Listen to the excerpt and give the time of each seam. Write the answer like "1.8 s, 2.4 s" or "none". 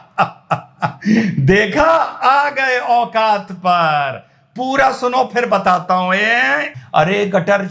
6.7 s